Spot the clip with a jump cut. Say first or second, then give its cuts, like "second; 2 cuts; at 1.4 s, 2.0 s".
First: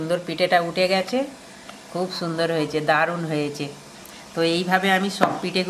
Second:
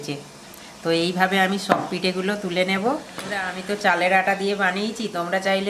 second; 1 cut; at 3.5 s